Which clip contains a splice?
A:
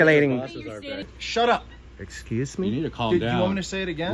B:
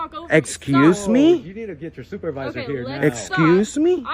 A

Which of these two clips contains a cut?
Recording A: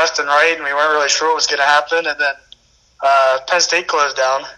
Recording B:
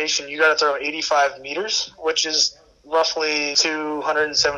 B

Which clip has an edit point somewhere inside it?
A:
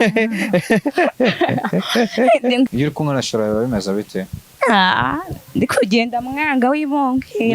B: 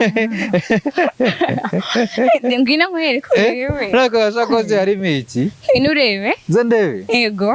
A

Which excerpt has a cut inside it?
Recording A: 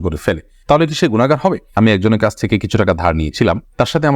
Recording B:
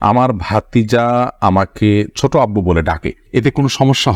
A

